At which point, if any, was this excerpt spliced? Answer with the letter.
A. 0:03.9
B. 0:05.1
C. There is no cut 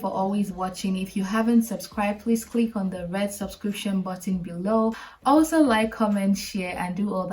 B